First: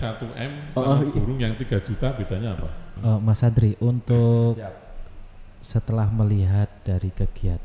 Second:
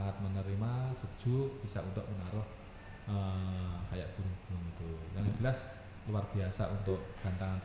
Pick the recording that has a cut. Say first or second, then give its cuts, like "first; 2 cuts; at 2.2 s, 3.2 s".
first; 1 cut; at 2.9 s